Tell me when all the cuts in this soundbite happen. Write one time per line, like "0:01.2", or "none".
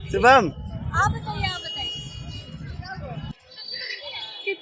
0:03.3